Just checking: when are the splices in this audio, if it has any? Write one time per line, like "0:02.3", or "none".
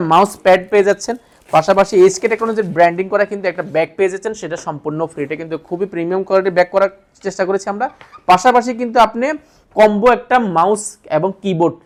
none